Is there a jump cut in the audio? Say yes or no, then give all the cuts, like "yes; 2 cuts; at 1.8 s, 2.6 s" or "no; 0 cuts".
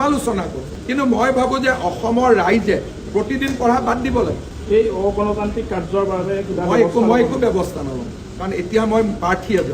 no; 0 cuts